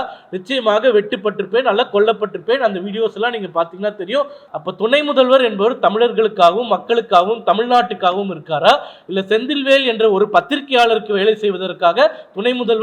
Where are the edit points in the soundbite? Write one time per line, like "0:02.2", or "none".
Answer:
0:04.4